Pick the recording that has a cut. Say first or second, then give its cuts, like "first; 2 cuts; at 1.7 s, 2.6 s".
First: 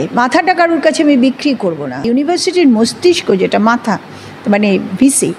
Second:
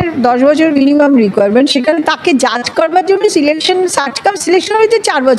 first; 1 cut; at 2.0 s